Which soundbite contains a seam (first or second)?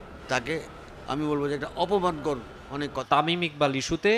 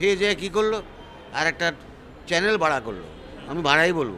first